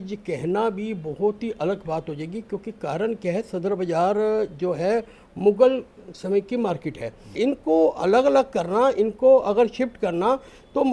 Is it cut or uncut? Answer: cut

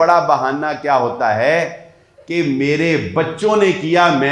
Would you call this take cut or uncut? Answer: uncut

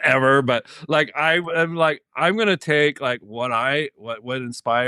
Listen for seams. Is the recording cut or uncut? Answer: uncut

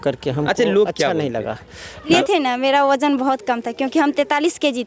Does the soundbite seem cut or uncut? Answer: cut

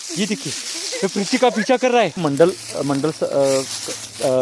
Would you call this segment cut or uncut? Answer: cut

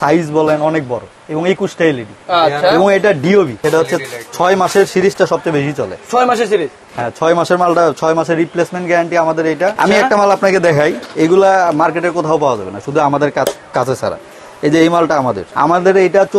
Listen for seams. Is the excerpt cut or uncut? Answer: cut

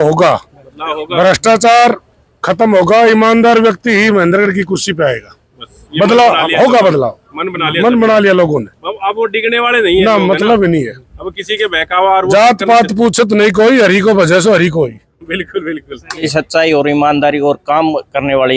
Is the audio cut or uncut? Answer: cut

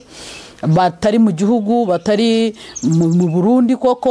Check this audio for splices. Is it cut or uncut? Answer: uncut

